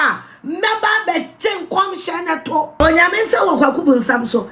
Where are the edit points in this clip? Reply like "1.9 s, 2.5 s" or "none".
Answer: 2.8 s